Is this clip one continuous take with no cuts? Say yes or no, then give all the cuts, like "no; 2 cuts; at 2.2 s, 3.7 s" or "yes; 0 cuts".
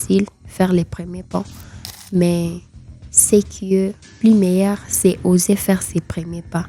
no; 1 cut; at 4.0 s